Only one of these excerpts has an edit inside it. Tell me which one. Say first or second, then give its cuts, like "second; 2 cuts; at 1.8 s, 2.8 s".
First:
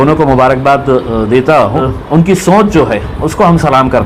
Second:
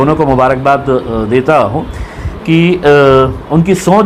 first; 1 cut; at 2.0 s